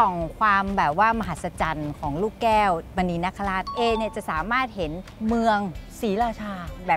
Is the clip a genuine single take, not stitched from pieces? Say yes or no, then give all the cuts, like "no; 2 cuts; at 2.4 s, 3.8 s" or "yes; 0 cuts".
no; 3 cuts; at 3.7 s, 5.0 s, 5.8 s